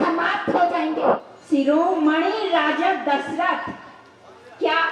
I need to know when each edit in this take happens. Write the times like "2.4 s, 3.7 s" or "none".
1.3 s